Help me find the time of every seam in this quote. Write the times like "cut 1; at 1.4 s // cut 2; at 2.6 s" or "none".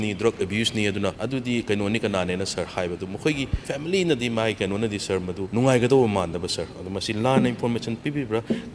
cut 1; at 1.2 s // cut 2; at 3.6 s // cut 3; at 5.4 s